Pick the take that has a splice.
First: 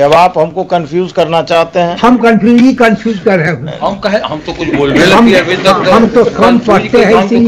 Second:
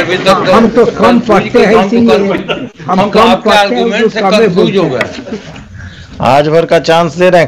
second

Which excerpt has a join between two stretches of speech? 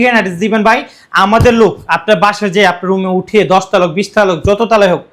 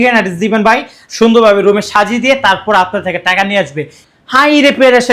second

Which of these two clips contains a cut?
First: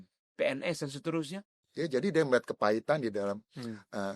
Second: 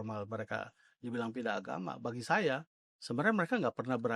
first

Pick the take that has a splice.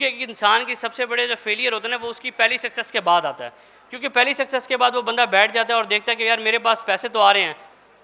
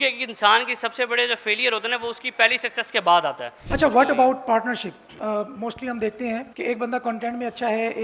second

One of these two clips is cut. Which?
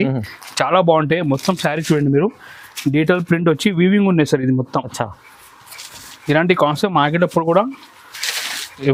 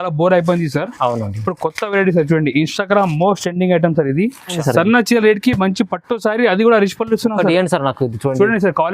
second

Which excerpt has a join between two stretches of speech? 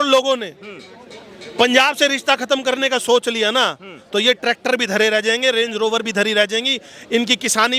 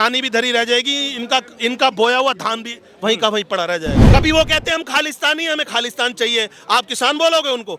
second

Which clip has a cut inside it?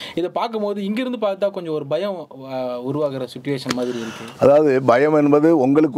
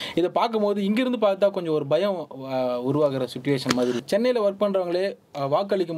second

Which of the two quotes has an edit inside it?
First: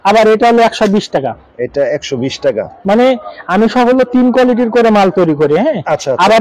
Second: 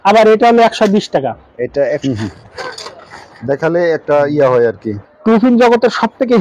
second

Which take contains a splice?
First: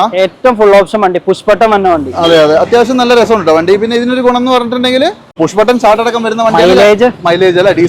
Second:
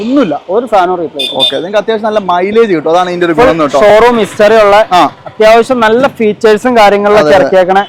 first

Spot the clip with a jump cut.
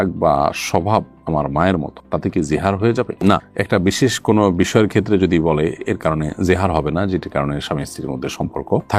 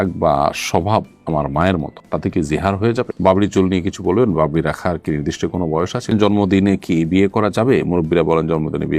second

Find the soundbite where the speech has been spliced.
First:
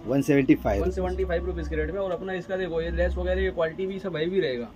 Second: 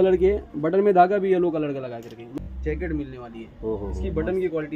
second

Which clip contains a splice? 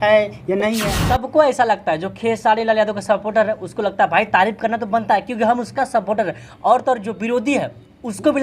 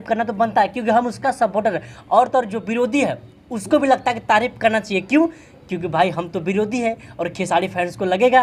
first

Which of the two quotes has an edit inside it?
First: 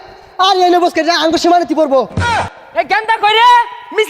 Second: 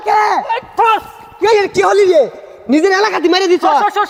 first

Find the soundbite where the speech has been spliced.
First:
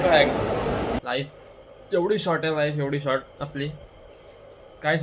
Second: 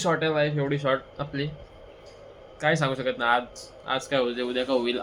first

